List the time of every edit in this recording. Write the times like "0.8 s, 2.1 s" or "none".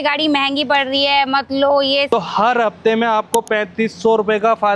2.1 s